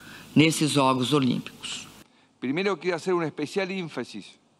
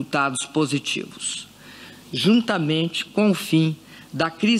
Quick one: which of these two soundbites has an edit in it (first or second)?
second